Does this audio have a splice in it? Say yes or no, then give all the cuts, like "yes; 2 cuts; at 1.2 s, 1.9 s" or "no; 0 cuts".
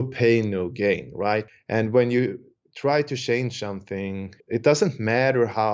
yes; 2 cuts; at 1.5 s, 4.3 s